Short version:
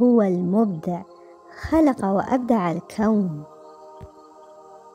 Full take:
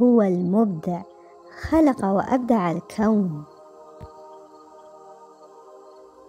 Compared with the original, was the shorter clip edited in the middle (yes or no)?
yes